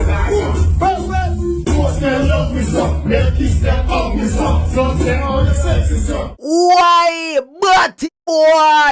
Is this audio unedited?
yes; 0 cuts

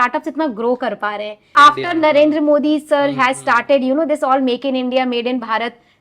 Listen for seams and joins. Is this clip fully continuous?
no; 1 cut; at 1.5 s

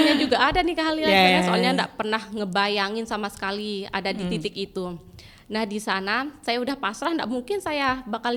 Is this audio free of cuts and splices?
yes; 0 cuts

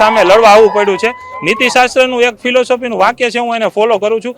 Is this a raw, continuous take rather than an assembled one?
yes; 0 cuts

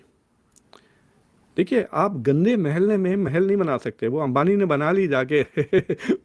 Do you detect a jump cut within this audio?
no; 0 cuts

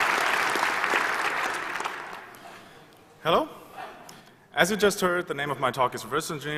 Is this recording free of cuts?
yes; 0 cuts

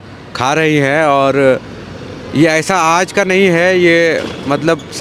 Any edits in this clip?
no; 0 cuts

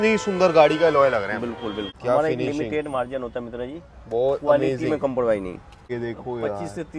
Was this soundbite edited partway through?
yes; 2 cuts; at 1.9 s, 5.9 s

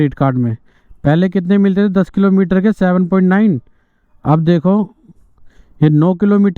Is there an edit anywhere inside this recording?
no; 0 cuts

